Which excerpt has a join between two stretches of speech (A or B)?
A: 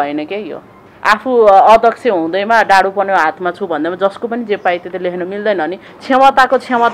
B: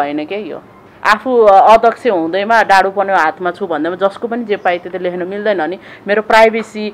A